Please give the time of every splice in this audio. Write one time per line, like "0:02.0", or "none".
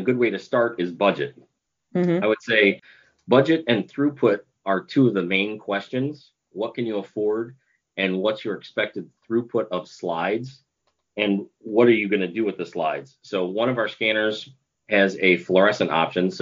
0:04.5